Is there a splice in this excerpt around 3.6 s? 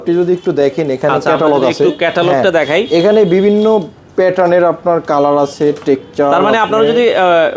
no; 0 cuts

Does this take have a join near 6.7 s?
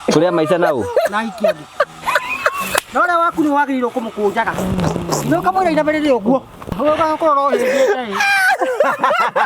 yes; 1 cut; at 6.7 s

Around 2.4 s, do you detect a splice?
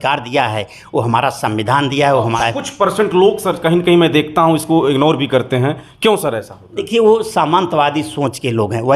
yes; 1 cut; at 2.4 s

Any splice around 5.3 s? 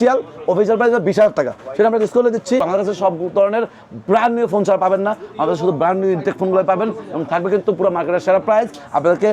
no; 1 cut; at 2.6 s

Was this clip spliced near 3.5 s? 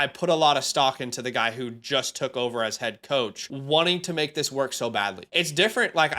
yes; 2 cuts; at 3.5 s, 5.2 s

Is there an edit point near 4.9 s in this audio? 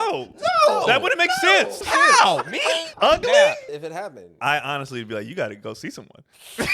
no; 3 cuts; at 1.8 s, 2.9 s, 3.7 s

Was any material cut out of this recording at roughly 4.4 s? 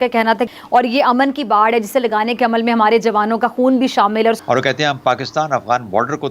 yes; 1 cut; at 4.4 s

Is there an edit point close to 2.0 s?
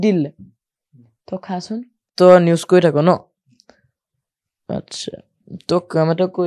yes; 1 cut; at 2.0 s

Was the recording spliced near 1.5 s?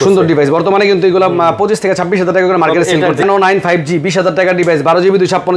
no; 1 cut; at 3.2 s

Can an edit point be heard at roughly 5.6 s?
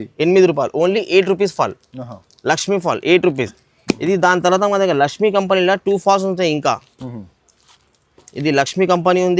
no; 0 cuts

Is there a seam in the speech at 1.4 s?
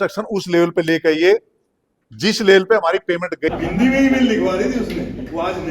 no; 1 cut; at 3.5 s

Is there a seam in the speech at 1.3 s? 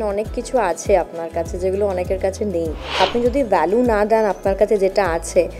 no; 1 cut; at 3.0 s

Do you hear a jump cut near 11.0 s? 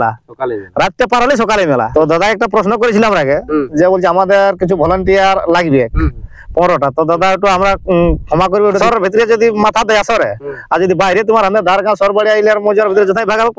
no; 2 cuts; at 1.9 s, 8.8 s

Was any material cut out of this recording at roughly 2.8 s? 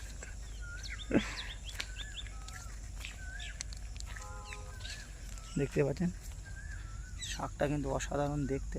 no; 0 cuts

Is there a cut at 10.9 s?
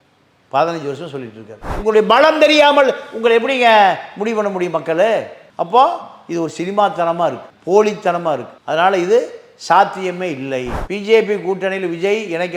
yes; 2 cuts; at 1.7 s, 10.9 s

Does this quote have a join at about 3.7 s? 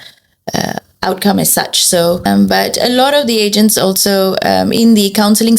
no; 1 cut; at 2.2 s

